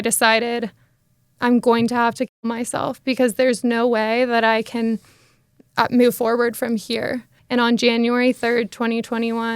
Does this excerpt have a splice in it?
yes; 1 cut; at 7.3 s

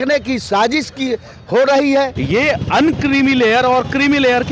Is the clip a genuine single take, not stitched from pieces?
no; 1 cut; at 2.2 s

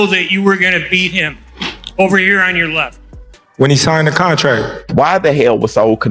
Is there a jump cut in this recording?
yes; 1 cut; at 4.8 s

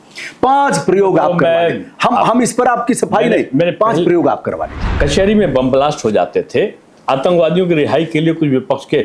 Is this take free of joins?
no; 1 cut; at 4.9 s

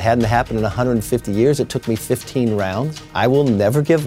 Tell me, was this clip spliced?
yes; 1 cut; at 3.0 s

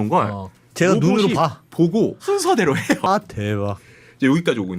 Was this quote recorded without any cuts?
no; 2 cuts; at 2.2 s, 3.1 s

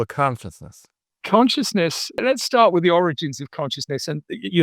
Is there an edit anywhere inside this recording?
yes; 2 cuts; at 1.2 s, 2.2 s

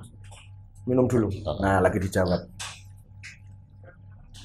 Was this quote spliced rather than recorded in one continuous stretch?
no; 0 cuts

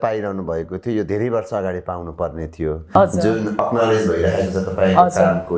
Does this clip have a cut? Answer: no; 0 cuts

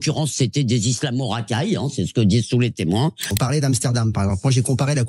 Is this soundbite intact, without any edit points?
no; 1 cut; at 3.3 s

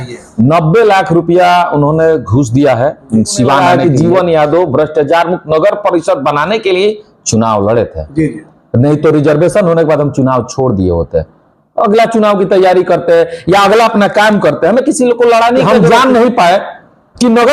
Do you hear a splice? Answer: yes; 2 cuts; at 3.6 s, 15.8 s

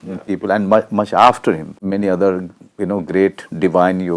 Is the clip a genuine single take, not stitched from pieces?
no; 1 cut; at 1.8 s

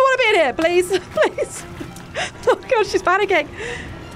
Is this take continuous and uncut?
yes; 0 cuts

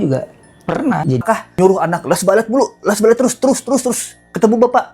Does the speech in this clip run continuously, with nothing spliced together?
no; 1 cut; at 1.2 s

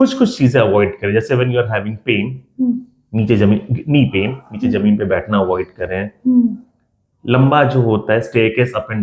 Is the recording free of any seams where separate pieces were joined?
yes; 0 cuts

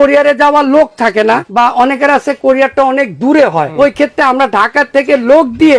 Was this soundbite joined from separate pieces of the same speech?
yes; 2 cuts; at 1.5 s, 3.7 s

